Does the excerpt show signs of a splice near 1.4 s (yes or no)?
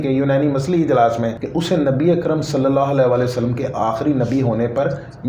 yes